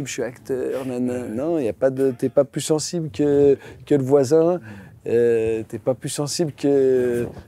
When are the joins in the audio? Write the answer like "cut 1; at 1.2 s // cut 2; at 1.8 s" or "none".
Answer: none